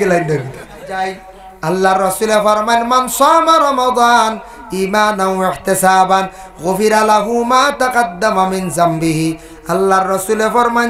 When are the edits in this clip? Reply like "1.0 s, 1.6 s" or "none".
1.0 s